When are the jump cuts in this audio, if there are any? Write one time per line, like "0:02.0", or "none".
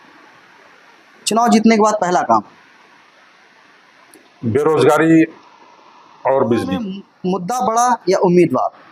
0:07.1